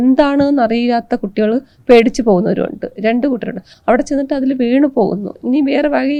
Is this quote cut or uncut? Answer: uncut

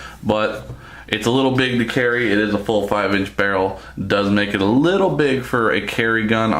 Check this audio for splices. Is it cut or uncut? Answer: uncut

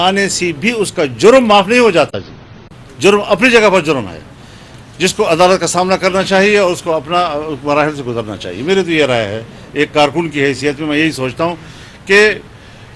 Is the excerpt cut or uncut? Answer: uncut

